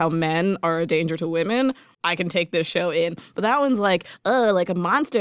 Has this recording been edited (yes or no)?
yes